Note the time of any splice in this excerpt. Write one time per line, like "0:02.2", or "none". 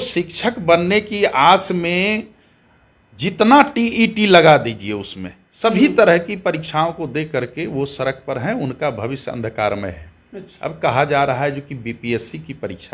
none